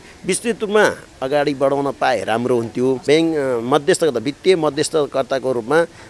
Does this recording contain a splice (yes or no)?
yes